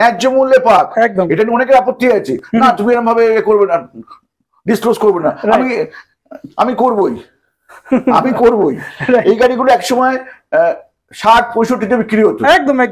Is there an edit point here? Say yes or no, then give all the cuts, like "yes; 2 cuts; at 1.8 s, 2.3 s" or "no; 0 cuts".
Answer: no; 0 cuts